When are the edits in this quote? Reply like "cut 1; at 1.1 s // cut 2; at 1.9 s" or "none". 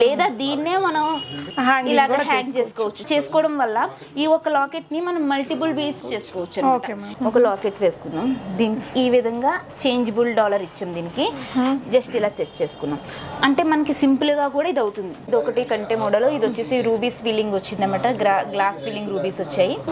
cut 1; at 3.0 s // cut 2; at 6.0 s // cut 3; at 7.1 s // cut 4; at 15.2 s